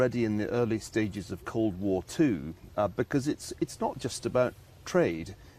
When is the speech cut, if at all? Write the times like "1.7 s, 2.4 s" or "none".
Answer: none